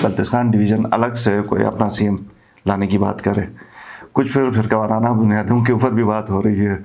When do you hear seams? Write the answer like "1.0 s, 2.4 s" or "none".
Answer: none